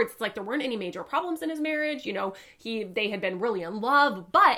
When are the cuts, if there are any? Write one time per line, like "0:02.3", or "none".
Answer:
none